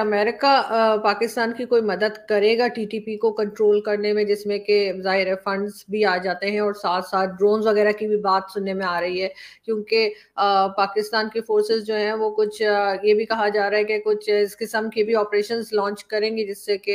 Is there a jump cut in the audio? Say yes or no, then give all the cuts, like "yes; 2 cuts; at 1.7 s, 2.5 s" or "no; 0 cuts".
no; 0 cuts